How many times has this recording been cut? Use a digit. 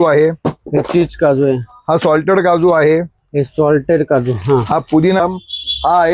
1